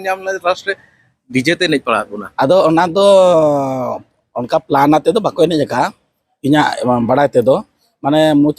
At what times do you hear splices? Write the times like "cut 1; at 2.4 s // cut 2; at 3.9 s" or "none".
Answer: cut 1; at 2.2 s